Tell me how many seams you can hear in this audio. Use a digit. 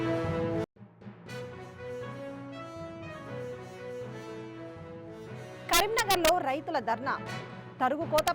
2